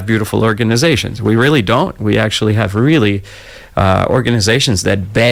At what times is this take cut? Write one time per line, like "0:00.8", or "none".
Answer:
none